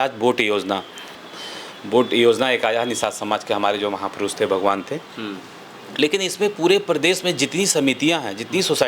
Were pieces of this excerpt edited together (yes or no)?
yes